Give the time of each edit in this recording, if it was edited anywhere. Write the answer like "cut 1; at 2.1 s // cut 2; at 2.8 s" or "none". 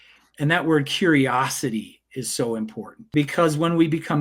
cut 1; at 3.0 s